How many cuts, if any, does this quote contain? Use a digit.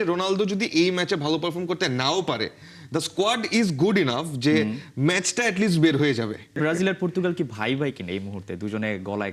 1